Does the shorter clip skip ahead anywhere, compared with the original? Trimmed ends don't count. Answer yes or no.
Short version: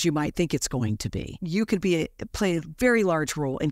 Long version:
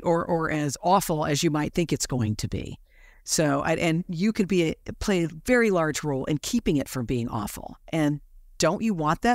yes